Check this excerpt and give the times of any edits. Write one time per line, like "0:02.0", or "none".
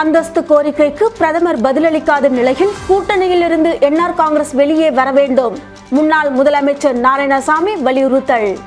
none